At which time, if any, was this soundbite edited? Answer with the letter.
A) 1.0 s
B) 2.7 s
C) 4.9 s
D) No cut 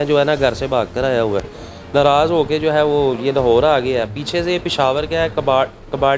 D